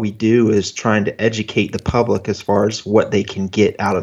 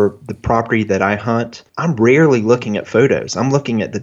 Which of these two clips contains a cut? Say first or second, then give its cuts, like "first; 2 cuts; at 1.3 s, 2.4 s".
second; 1 cut; at 1.6 s